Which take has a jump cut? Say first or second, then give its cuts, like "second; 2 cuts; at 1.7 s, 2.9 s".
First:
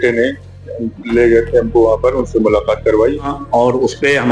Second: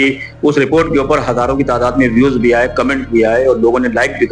first; 1 cut; at 3.3 s